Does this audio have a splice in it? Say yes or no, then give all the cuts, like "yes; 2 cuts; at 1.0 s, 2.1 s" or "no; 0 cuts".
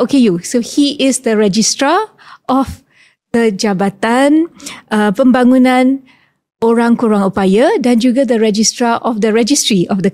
no; 0 cuts